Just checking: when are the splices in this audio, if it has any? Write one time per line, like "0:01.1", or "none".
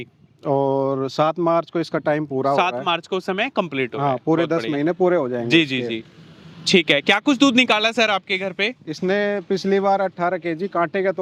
none